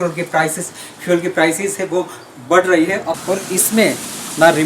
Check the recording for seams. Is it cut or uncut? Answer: cut